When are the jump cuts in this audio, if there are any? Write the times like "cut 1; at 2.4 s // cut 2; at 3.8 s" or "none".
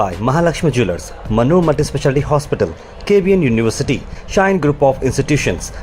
none